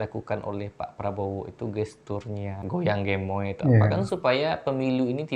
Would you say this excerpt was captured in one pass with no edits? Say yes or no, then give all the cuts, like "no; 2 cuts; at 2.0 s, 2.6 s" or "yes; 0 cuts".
no; 1 cut; at 2.6 s